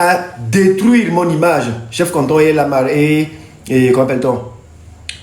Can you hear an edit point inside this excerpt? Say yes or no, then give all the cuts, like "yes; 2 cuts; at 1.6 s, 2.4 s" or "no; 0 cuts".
no; 0 cuts